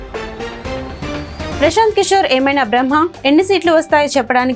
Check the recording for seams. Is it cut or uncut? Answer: uncut